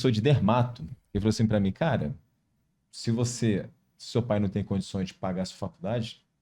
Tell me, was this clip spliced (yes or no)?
no